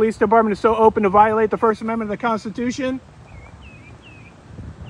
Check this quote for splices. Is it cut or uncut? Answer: uncut